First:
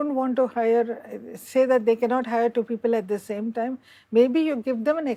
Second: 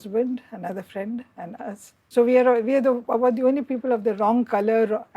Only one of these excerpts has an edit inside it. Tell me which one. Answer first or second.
second